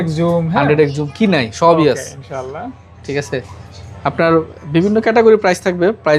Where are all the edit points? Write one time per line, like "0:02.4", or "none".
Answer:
none